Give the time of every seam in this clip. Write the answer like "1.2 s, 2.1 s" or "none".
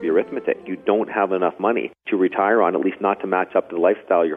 1.9 s